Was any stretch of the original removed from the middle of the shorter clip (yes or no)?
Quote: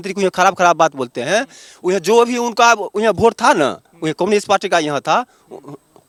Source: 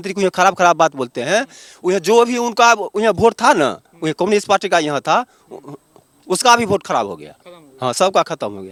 no